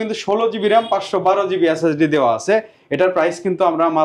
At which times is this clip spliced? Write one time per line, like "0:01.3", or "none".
none